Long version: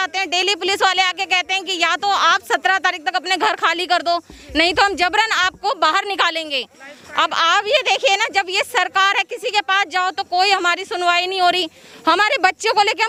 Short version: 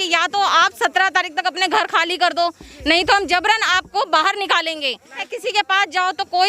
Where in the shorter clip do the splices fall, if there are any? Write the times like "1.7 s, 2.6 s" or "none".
5.3 s